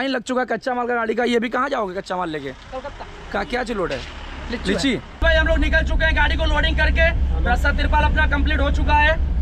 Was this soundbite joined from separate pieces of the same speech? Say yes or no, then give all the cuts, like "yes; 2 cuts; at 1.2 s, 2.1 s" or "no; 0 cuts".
yes; 1 cut; at 5.2 s